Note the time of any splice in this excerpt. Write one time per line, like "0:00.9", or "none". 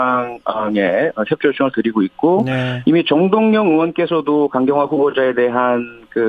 none